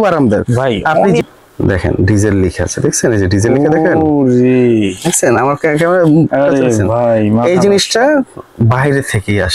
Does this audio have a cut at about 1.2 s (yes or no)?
yes